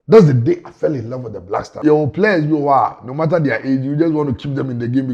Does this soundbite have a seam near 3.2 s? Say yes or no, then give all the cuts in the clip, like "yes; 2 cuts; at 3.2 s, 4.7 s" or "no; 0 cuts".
no; 1 cut; at 1.8 s